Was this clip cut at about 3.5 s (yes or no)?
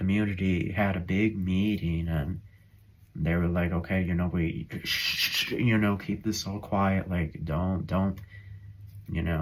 no